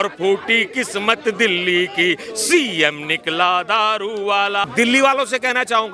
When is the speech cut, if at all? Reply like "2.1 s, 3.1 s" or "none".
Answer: 4.7 s